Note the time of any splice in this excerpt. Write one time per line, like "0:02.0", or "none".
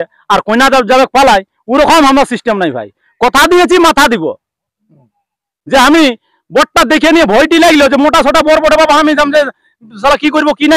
none